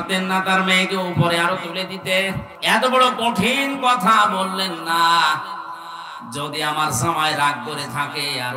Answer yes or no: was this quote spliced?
yes